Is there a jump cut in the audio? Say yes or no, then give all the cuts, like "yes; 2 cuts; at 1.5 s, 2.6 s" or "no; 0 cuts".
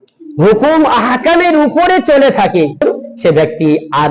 yes; 1 cut; at 2.8 s